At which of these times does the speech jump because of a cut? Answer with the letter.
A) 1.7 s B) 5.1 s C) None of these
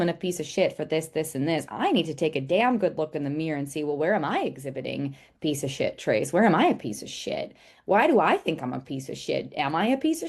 C